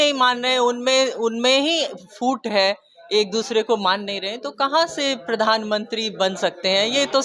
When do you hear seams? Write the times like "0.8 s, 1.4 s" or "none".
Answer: none